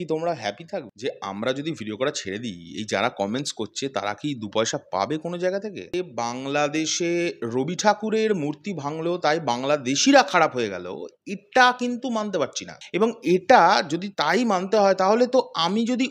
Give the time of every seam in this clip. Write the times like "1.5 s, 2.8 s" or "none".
0.9 s, 6.0 s